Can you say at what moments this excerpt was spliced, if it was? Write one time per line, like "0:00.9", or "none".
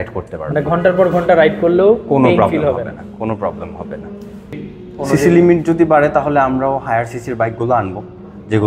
0:04.5